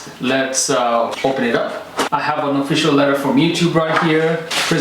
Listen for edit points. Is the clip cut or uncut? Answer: cut